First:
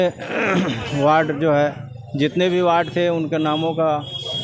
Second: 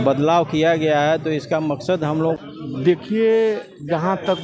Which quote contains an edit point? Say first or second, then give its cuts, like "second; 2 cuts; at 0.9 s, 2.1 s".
second; 1 cut; at 2.4 s